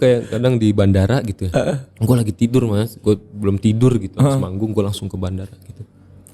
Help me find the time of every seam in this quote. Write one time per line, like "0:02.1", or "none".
0:01.9